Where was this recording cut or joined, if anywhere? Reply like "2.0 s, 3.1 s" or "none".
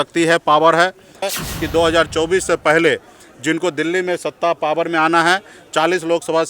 1.2 s